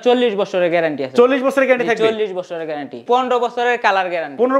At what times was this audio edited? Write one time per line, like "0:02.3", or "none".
0:03.0